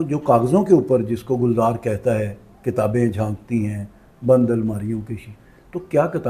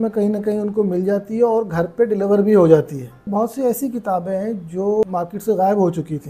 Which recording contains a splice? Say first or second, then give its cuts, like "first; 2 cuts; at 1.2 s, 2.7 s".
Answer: second; 1 cut; at 3.2 s